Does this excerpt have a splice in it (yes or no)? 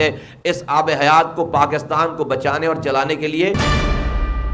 yes